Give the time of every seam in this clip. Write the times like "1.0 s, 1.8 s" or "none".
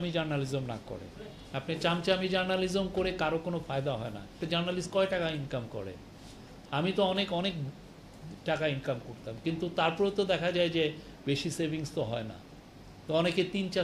4.4 s